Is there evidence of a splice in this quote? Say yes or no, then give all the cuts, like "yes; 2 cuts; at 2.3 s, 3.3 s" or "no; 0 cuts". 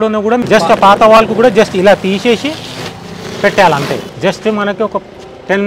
no; 0 cuts